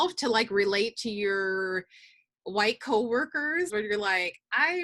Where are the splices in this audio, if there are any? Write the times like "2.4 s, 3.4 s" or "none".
3.7 s

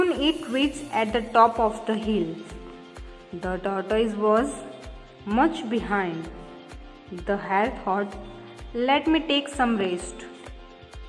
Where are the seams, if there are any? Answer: none

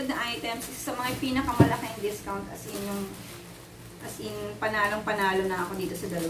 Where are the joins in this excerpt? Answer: none

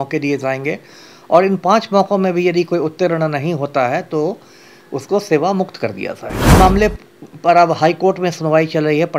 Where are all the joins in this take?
6.5 s

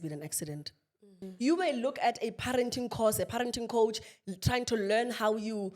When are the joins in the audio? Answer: 1.2 s

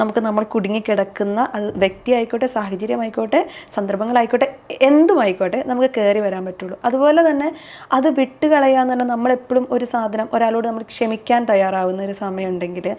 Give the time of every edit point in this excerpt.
none

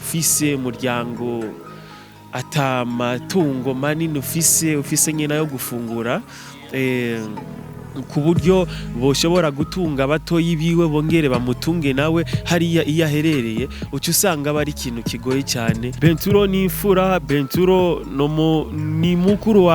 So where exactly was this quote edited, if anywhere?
15.9 s

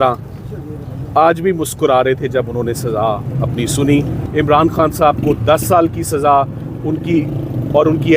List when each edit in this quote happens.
4.2 s

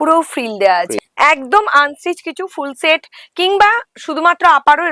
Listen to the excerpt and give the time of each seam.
1.0 s

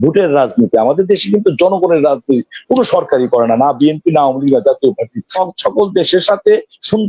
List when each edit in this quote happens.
5.3 s

